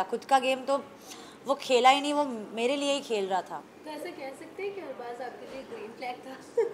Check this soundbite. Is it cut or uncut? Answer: uncut